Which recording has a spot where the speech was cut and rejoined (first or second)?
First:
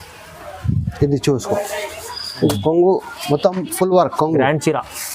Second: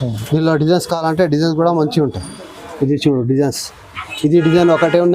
first